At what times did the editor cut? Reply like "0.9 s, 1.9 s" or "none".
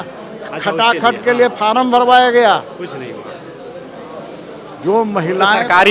none